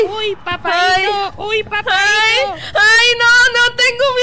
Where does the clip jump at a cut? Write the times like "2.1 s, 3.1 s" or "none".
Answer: none